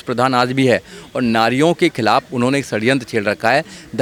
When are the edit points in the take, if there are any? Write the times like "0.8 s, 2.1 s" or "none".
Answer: none